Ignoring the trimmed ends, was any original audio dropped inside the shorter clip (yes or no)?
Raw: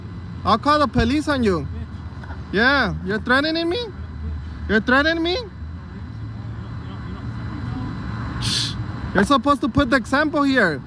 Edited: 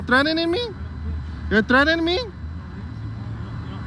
no